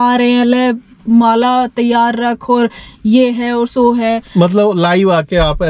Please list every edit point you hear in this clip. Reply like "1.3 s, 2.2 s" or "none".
none